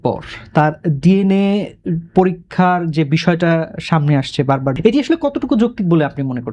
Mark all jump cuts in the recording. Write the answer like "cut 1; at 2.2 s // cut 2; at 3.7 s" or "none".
cut 1; at 4.7 s